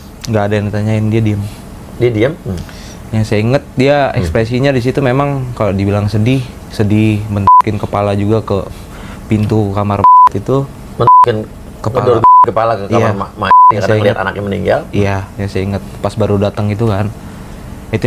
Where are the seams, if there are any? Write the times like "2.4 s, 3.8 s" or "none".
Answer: none